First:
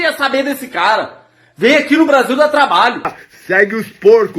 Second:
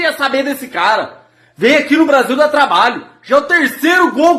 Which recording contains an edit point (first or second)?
first